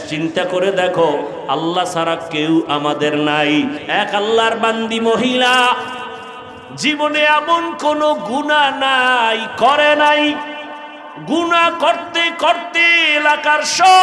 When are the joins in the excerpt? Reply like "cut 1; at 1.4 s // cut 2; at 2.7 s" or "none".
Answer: cut 1; at 3.8 s